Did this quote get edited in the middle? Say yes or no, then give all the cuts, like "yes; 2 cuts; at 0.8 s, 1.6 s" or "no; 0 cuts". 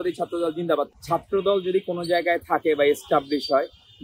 yes; 1 cut; at 1.0 s